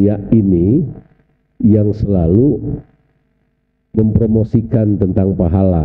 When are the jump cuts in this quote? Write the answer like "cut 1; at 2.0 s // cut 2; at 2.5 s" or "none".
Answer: none